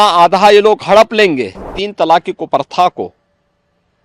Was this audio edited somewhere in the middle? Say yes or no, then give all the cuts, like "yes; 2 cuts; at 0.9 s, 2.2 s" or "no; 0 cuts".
yes; 1 cut; at 1.8 s